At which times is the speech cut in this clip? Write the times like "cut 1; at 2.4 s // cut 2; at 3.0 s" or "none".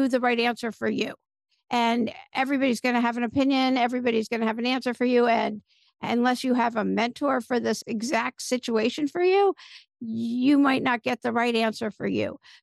cut 1; at 7.8 s

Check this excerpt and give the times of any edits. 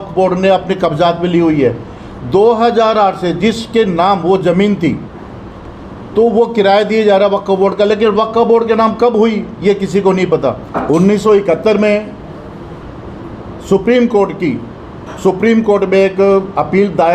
cut 1; at 10.7 s

